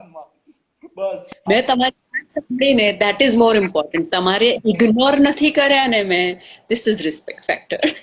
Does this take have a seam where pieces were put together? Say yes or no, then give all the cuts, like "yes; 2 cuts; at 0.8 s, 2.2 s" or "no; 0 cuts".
no; 0 cuts